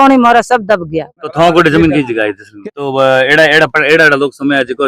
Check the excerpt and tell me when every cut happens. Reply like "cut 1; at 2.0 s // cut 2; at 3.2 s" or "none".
cut 1; at 1.3 s // cut 2; at 2.6 s